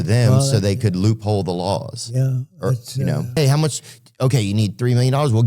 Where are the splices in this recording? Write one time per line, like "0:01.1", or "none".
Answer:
0:03.4